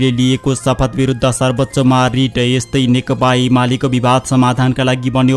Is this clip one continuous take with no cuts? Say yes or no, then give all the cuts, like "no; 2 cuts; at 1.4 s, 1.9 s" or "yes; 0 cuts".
yes; 0 cuts